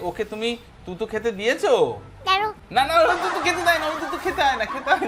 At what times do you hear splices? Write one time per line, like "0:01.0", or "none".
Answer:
none